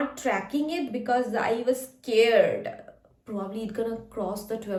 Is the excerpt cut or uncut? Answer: uncut